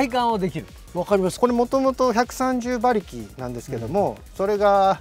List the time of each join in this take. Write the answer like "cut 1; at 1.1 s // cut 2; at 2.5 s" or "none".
cut 1; at 1.3 s

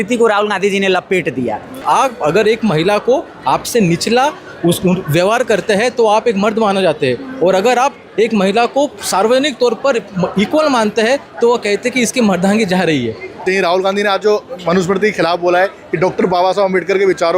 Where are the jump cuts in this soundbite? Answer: cut 1; at 1.8 s // cut 2; at 13.4 s

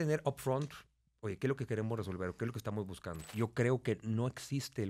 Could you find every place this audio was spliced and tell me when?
cut 1; at 3.2 s

